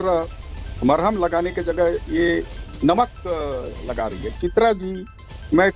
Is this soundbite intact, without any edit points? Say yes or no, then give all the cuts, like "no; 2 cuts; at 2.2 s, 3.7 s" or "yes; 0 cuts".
yes; 0 cuts